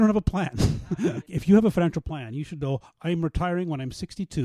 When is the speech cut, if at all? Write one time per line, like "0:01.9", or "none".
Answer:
0:01.2